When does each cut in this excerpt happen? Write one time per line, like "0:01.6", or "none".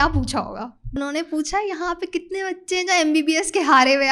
0:00.9